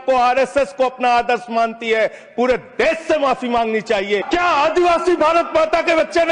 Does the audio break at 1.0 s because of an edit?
no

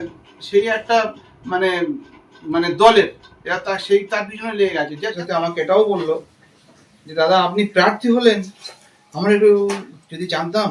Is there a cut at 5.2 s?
yes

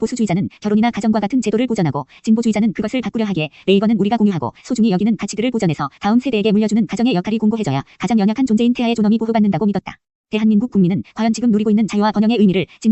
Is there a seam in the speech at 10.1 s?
yes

